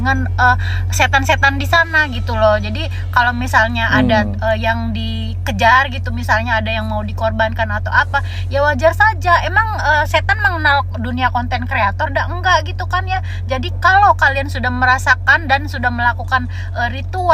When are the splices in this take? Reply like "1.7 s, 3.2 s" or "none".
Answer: none